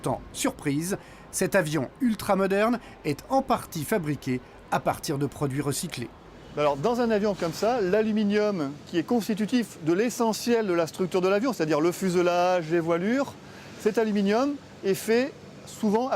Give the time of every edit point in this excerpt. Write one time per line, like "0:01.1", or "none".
0:10.9